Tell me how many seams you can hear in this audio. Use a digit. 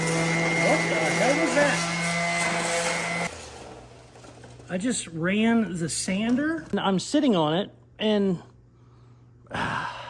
2